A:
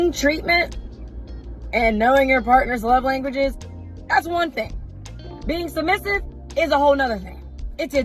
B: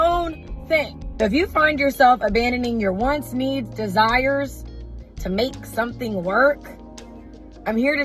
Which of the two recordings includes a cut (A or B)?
B